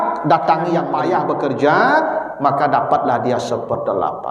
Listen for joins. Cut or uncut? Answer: cut